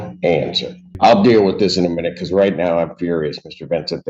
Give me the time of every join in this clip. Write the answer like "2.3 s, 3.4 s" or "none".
0.9 s